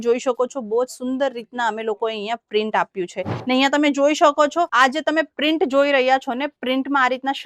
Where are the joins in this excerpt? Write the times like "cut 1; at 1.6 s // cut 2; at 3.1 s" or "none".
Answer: cut 1; at 3.3 s